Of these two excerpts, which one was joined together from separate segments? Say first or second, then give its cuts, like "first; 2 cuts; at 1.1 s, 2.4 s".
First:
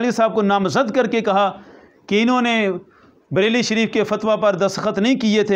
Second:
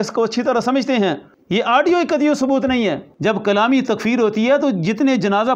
second; 2 cuts; at 1.3 s, 3.1 s